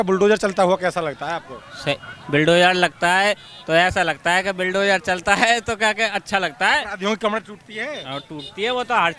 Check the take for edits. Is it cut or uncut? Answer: uncut